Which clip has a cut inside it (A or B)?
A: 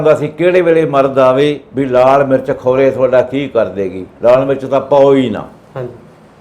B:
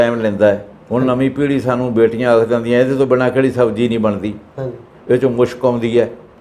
A